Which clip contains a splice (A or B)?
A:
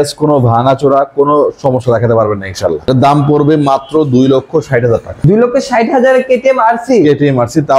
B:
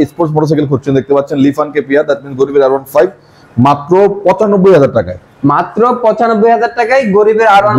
A